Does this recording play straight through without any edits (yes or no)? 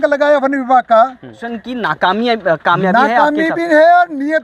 no